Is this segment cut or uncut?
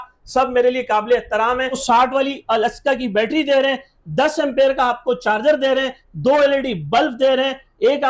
cut